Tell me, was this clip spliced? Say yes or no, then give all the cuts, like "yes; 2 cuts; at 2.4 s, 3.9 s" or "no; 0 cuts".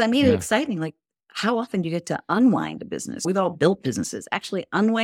no; 0 cuts